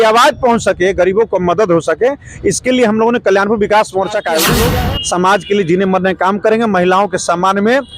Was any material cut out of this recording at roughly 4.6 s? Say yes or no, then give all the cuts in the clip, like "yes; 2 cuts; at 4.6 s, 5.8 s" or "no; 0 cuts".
yes; 1 cut; at 4.6 s